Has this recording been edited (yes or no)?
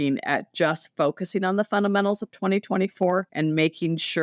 yes